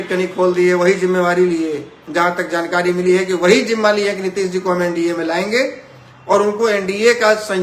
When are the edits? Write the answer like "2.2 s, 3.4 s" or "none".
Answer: none